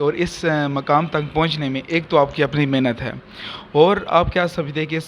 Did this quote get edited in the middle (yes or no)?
no